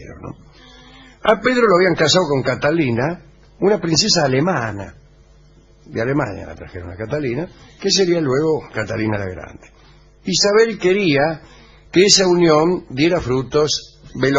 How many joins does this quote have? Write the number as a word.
zero